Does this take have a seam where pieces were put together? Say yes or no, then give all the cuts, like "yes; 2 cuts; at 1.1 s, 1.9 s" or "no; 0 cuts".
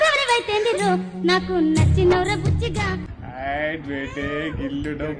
yes; 1 cut; at 3.1 s